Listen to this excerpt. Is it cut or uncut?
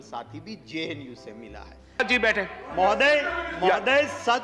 cut